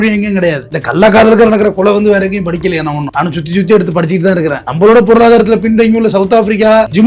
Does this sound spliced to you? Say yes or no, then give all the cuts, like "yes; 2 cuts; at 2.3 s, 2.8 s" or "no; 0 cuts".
no; 0 cuts